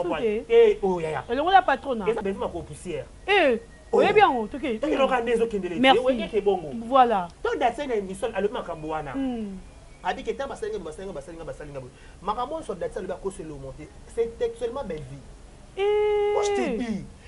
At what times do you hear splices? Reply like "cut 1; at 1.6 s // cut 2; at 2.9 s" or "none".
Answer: cut 1; at 2.2 s